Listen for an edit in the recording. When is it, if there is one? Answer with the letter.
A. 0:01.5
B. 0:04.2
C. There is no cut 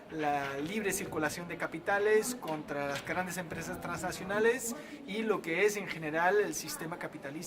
A